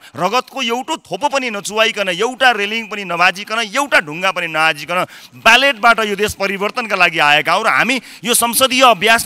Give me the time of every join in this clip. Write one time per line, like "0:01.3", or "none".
none